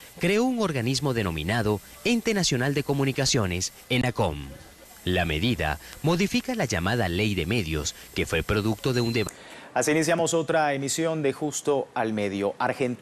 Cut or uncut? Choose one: uncut